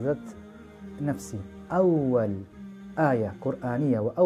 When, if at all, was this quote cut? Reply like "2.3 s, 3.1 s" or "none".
1.6 s